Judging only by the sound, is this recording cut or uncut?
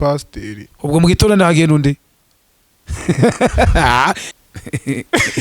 cut